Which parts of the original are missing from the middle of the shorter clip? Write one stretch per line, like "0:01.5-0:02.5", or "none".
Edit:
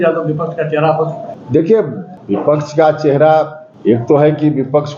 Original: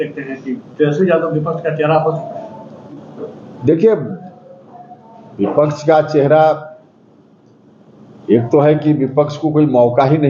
0:02.4-0:03.5
0:04.2-0:05.2
0:06.7-0:08.1